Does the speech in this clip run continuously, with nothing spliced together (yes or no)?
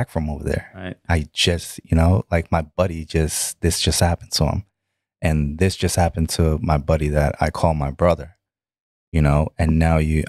yes